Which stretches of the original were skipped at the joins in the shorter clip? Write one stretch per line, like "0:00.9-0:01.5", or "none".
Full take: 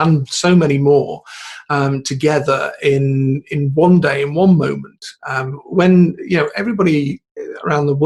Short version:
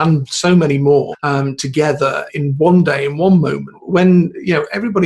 0:01.2-0:01.6
0:02.7-0:03.4
0:04.9-0:05.6